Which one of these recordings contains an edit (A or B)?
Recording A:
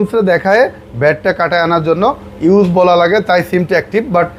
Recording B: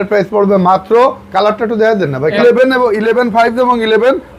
B